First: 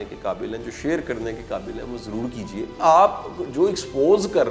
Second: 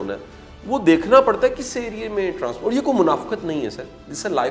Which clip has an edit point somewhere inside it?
first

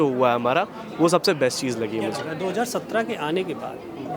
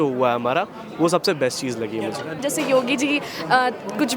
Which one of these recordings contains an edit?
second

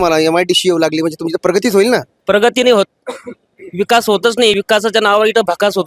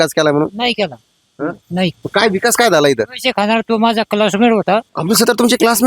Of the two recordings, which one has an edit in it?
second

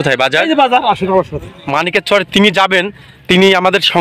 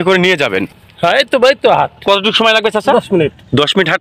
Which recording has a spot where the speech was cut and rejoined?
first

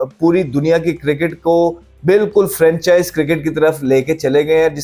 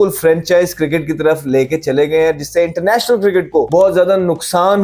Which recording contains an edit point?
second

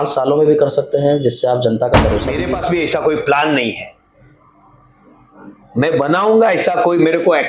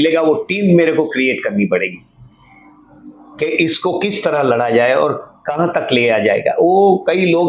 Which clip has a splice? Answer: first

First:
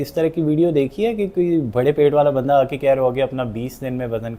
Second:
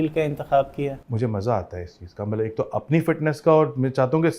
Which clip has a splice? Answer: second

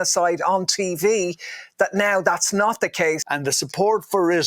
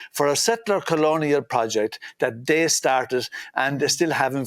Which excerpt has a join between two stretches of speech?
first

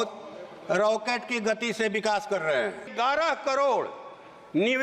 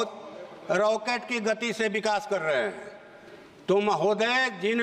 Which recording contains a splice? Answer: first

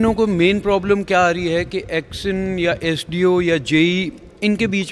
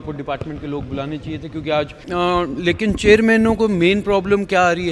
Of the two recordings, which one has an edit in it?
second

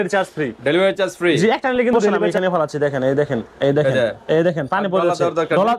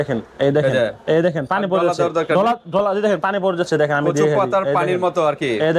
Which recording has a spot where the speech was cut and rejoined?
first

